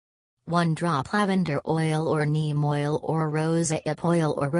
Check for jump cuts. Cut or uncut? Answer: cut